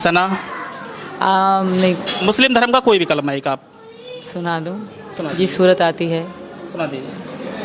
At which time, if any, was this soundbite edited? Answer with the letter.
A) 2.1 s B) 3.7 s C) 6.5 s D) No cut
A